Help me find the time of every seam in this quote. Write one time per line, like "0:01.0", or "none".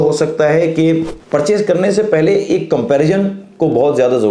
0:01.1

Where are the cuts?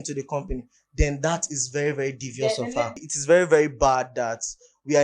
0:02.9

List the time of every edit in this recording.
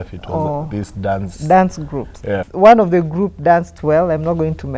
0:02.4

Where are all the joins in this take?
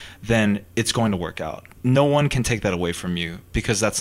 0:01.6

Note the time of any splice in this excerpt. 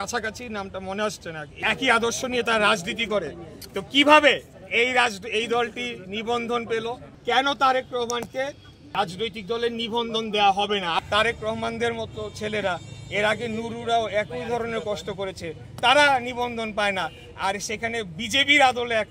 0:01.6
0:07.1
0:09.0
0:11.0

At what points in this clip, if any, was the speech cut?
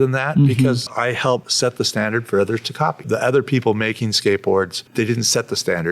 0:01.2
0:03.0
0:04.8

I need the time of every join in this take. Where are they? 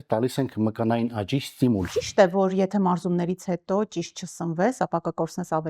0:01.9

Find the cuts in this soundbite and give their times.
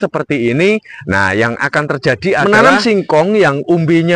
0:02.4

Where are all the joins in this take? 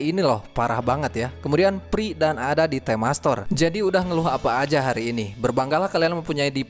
0:03.5

